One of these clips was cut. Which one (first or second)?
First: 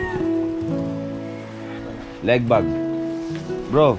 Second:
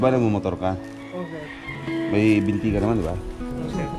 first